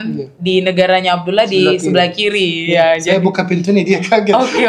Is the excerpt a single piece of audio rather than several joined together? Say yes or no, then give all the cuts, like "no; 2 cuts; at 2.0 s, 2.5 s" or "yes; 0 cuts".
yes; 0 cuts